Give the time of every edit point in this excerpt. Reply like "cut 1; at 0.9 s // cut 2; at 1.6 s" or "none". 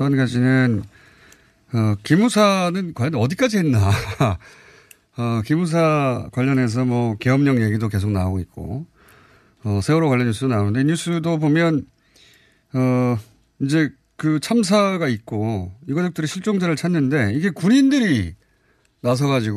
cut 1; at 2.4 s